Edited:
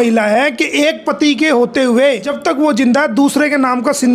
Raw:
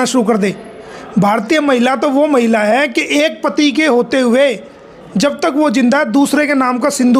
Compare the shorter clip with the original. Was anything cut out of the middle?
yes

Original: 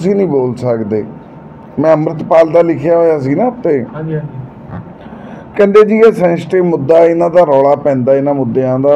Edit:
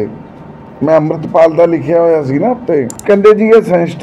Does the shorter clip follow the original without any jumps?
no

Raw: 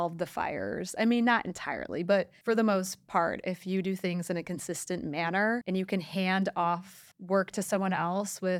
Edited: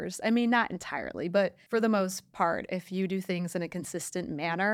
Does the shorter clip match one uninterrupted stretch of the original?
yes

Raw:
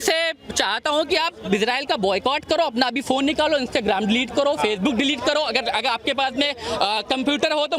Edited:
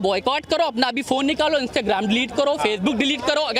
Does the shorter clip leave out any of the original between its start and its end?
no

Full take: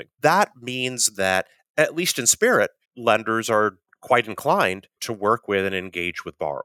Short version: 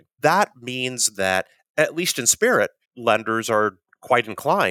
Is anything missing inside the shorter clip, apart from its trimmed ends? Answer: no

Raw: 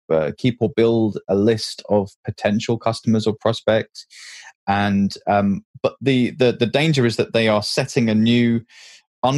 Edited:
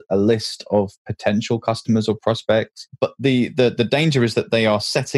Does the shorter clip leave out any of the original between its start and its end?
yes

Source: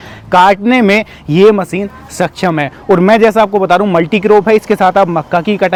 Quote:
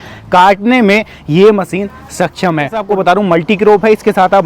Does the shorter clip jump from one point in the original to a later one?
yes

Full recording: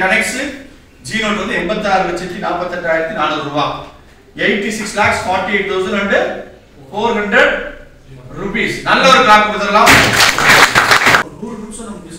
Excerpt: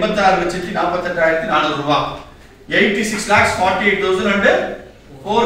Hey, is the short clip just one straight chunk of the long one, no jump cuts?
yes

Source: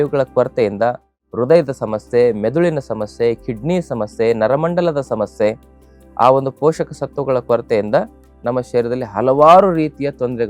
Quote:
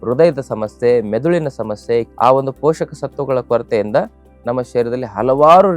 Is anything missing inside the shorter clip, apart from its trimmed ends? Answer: yes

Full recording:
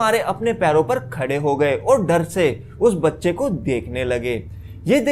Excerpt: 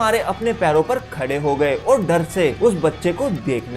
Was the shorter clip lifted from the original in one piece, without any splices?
no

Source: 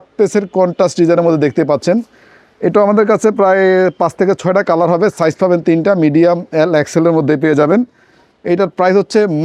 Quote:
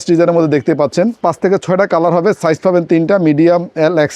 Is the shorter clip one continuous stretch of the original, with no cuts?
no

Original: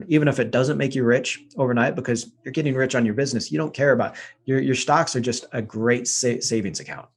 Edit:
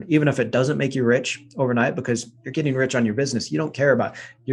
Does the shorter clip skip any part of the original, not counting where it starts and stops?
no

